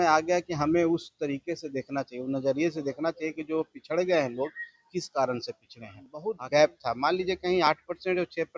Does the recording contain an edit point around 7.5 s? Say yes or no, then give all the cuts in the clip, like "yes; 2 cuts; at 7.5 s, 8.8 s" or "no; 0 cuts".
no; 1 cut; at 6.2 s